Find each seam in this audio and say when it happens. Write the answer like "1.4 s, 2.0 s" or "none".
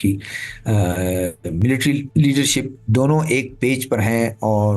2.1 s, 2.8 s